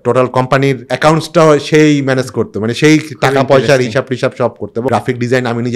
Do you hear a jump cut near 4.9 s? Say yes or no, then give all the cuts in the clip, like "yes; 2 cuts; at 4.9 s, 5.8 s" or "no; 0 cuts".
yes; 2 cuts; at 0.9 s, 4.9 s